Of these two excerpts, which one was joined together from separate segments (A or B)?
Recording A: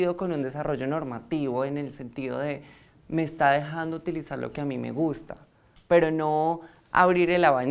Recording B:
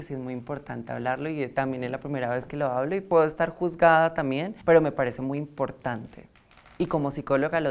B